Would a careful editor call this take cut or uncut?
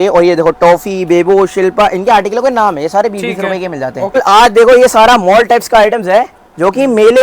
cut